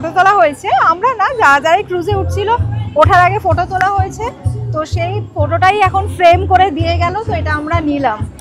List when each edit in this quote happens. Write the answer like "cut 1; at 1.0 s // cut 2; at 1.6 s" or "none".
none